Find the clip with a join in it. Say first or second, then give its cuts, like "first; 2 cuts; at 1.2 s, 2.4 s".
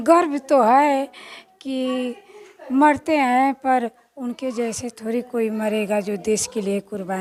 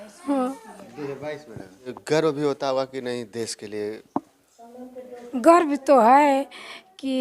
second; 1 cut; at 1.9 s